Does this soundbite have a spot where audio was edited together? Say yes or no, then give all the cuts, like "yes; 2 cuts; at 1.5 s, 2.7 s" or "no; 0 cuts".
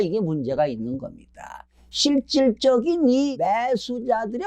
yes; 2 cuts; at 1.7 s, 3.3 s